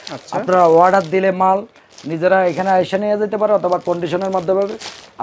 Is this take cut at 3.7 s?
no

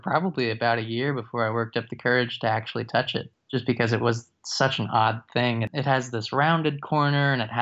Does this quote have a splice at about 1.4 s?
no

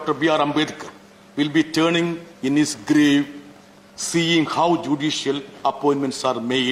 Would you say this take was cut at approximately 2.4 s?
no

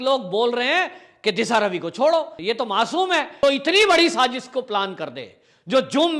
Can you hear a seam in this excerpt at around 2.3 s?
yes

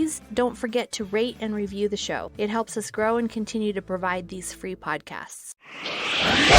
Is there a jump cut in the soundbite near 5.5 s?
yes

